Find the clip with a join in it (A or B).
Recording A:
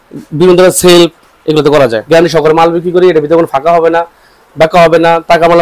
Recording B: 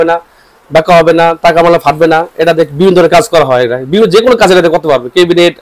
A